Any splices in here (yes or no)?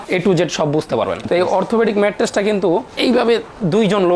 yes